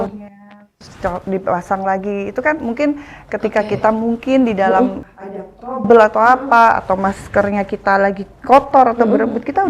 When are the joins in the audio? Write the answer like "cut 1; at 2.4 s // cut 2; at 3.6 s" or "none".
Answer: cut 1; at 5.0 s